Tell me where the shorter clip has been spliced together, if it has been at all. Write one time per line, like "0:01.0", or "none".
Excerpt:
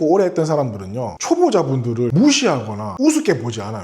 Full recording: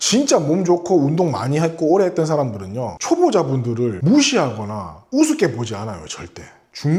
0:02.1
0:02.8

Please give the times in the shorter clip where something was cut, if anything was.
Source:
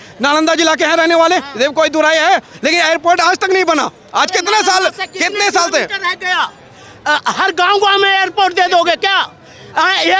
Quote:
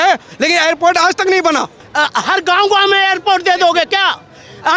0:01.8

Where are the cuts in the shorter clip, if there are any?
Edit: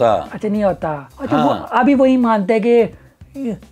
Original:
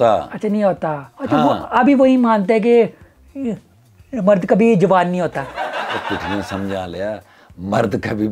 none

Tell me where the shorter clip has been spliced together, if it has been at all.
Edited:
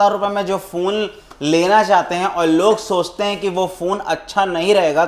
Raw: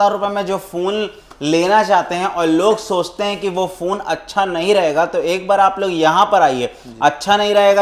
none

